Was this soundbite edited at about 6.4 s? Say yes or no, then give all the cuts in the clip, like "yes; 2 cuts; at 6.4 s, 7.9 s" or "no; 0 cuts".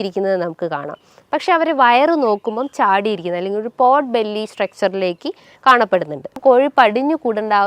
yes; 1 cut; at 6.4 s